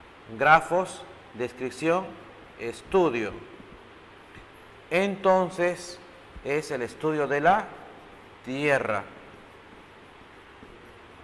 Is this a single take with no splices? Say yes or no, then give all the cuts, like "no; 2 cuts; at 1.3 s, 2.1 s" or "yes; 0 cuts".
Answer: no; 1 cut; at 1.6 s